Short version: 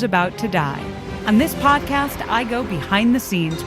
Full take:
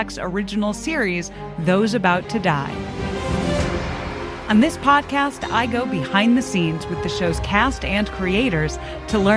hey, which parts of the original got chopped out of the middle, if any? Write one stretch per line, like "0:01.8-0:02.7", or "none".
0:03.0-0:04.3